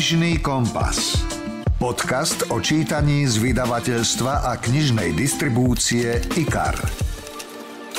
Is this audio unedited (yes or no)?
yes